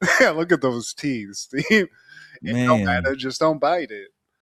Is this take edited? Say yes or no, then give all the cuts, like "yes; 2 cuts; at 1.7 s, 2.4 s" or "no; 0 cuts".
no; 0 cuts